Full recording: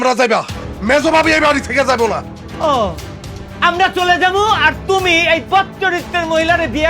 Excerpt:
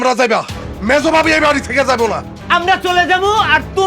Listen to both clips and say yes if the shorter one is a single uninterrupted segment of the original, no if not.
no